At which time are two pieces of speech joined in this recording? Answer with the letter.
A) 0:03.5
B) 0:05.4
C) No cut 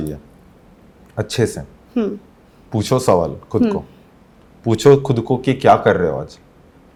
C